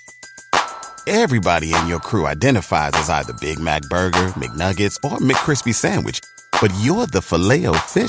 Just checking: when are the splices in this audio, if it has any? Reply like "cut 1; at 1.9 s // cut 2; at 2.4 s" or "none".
none